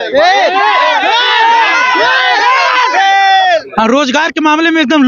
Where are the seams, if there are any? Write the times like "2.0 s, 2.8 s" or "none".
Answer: 3.7 s